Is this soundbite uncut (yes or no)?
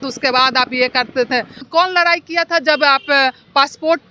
no